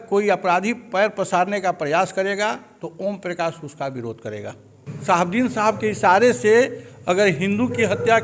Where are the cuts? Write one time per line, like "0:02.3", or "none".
0:04.9